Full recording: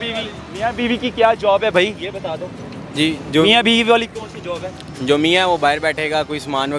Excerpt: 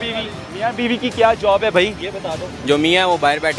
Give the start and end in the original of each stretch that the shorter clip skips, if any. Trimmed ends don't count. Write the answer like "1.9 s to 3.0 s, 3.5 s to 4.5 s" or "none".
2.5 s to 4.9 s